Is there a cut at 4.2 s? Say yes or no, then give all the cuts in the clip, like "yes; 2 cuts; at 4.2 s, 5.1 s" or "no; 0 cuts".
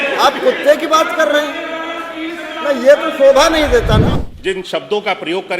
yes; 1 cut; at 4.2 s